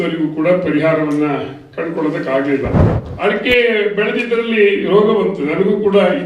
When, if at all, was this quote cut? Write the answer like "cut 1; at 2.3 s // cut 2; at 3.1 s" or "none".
cut 1; at 2.8 s